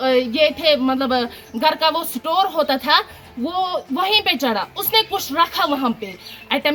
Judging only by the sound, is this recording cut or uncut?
uncut